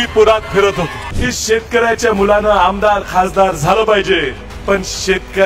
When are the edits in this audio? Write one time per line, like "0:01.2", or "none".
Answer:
0:01.1
0:04.5

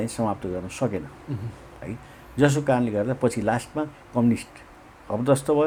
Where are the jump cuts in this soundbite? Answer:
none

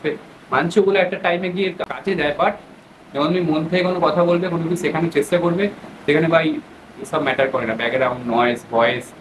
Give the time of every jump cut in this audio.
0:01.9

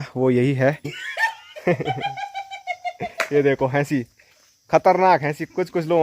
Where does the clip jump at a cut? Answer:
0:00.9

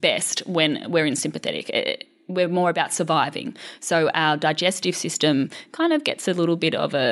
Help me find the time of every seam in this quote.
none

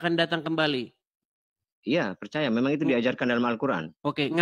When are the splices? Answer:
none

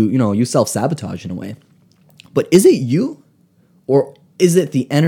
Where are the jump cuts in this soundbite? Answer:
none

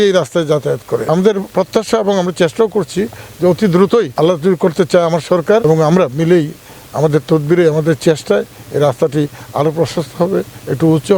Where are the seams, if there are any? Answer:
0:01.3
0:04.1
0:05.6

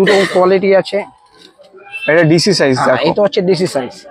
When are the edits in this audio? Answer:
none

